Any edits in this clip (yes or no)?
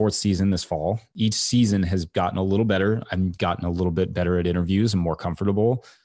yes